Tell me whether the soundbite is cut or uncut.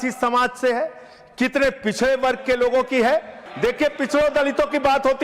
cut